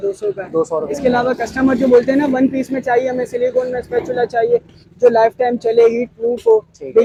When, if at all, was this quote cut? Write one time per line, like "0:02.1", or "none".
none